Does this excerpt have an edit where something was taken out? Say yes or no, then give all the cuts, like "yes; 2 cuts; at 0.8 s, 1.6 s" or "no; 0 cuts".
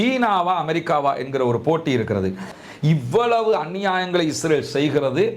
yes; 1 cut; at 2.5 s